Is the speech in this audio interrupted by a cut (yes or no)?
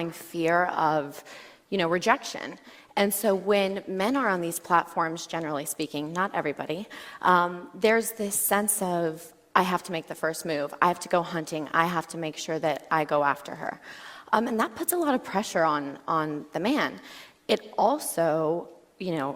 no